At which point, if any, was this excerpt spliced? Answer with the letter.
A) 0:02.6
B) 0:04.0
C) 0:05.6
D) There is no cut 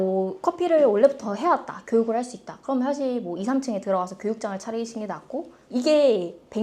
C